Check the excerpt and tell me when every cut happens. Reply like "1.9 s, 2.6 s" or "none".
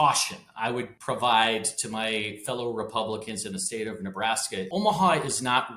0.9 s, 4.7 s